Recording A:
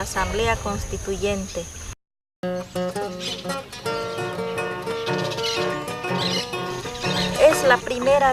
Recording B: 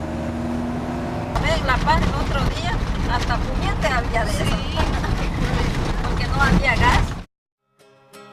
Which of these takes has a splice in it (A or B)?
A